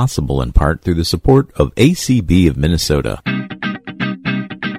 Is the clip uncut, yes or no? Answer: no